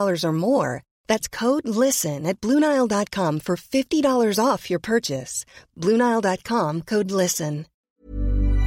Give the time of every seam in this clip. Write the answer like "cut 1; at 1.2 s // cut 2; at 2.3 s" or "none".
cut 1; at 7.8 s